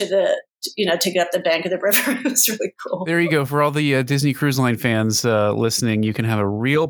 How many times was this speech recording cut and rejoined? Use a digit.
1